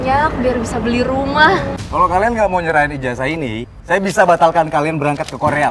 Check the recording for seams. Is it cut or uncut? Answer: cut